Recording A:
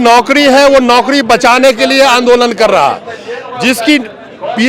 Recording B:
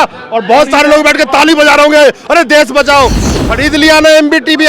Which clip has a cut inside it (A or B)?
B